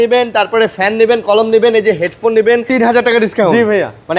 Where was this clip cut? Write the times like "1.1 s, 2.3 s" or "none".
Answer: 2.6 s

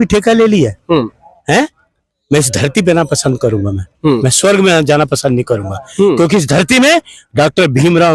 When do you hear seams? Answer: none

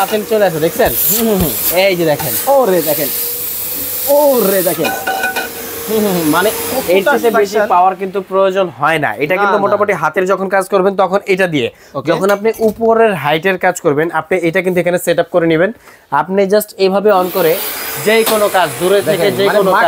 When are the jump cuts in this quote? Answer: none

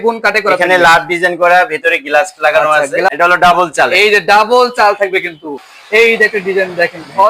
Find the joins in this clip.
3.1 s, 5.6 s

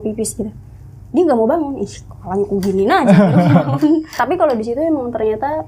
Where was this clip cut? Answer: 4.1 s

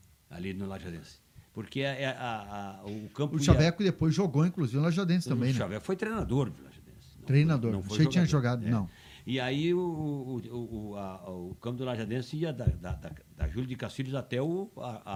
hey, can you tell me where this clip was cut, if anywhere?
none

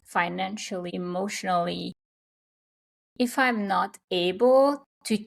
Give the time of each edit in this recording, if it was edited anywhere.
0.9 s

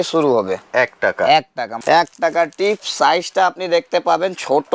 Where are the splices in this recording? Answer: 1.7 s

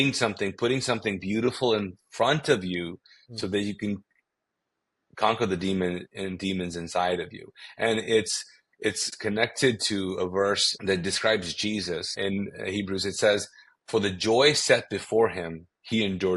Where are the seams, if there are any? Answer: 9.1 s, 10.7 s, 12.2 s

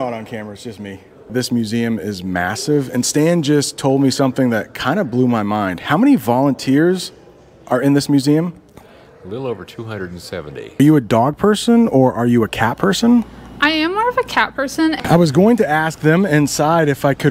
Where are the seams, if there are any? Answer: 1.3 s, 10.8 s, 15.0 s

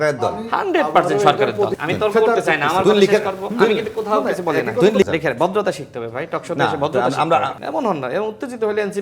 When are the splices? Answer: 1.7 s, 5.0 s, 7.6 s

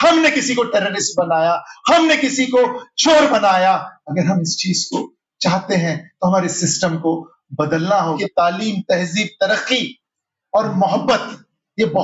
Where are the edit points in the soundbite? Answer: 8.1 s

